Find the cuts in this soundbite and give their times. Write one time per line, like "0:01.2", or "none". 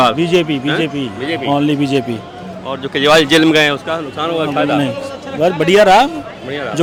none